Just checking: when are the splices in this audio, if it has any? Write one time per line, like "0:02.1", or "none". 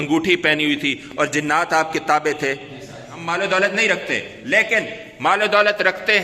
0:03.2